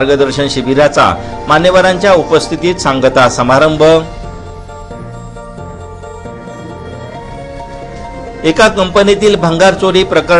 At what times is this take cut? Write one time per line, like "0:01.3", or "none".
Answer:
0:05.9
0:07.2